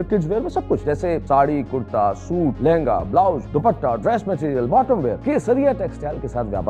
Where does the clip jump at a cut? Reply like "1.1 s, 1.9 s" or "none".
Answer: 0.9 s, 2.6 s, 3.4 s, 5.2 s